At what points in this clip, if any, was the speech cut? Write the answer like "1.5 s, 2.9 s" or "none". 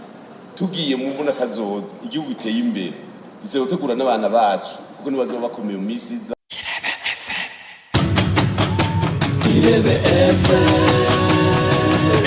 6.3 s